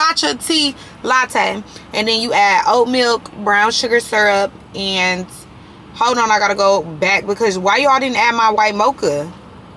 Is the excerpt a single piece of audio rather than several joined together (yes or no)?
yes